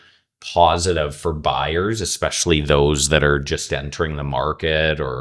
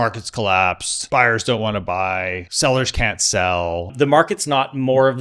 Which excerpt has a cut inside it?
second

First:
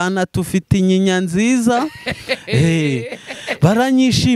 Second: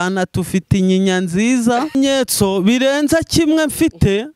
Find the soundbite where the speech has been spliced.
second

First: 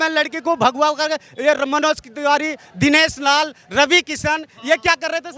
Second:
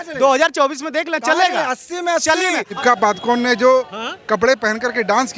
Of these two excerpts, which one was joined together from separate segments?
second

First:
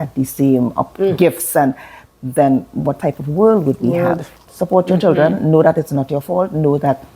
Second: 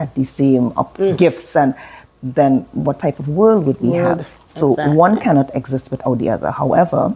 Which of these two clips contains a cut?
first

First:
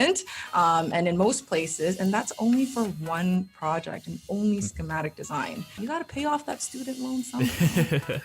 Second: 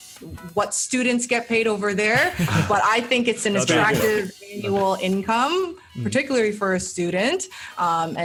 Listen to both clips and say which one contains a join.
first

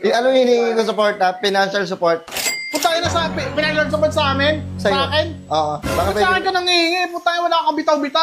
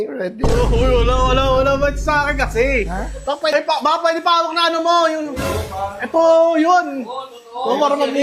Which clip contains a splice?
second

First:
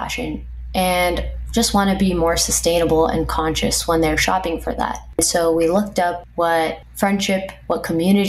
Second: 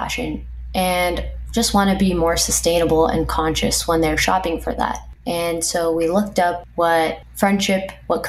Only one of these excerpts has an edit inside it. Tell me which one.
first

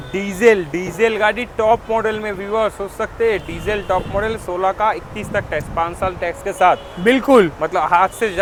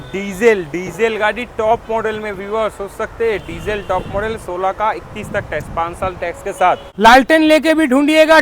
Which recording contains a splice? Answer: second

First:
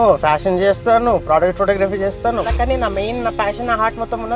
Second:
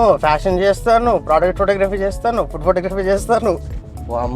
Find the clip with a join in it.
first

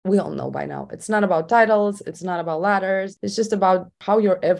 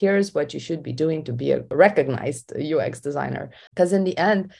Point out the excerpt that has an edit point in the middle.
second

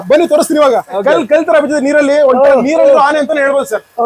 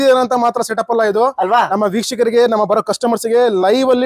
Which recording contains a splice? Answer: first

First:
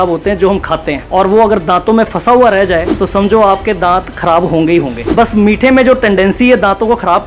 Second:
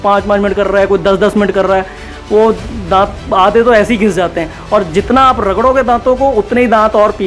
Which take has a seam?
first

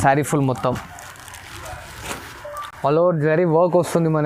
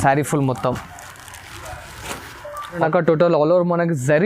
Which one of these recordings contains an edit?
second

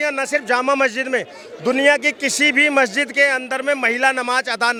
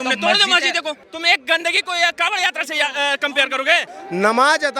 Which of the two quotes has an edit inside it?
second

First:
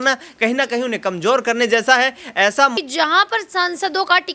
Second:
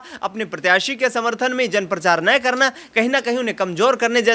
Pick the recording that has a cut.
first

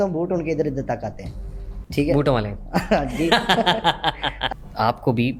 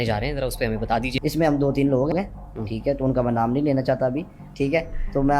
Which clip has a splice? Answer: second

